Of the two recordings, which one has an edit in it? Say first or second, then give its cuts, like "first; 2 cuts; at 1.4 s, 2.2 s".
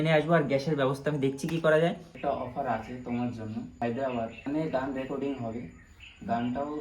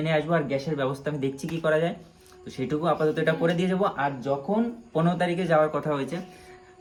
first; 2 cuts; at 2.1 s, 4.1 s